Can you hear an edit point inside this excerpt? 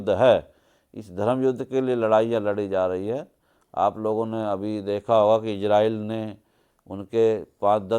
no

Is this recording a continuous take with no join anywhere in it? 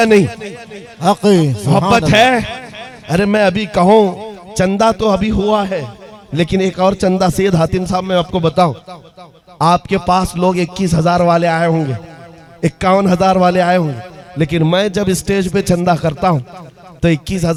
yes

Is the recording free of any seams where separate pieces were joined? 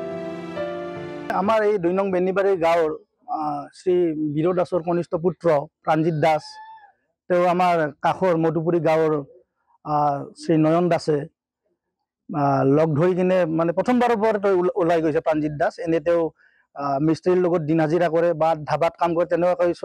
no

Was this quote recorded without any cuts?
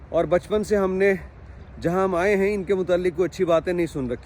yes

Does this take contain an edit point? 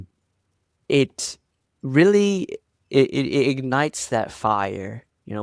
no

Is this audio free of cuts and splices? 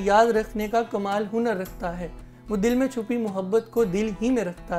yes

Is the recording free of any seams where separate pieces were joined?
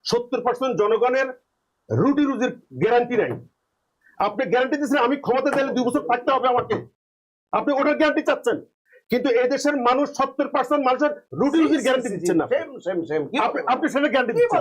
yes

